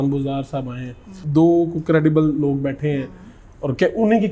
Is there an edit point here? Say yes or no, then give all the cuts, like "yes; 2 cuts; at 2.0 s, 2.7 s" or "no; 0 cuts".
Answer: yes; 1 cut; at 1.2 s